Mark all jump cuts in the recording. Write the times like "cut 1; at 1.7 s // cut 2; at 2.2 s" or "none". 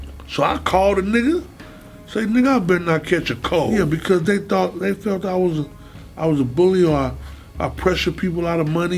cut 1; at 3.7 s